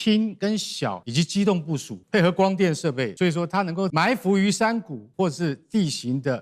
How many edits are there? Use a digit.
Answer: 4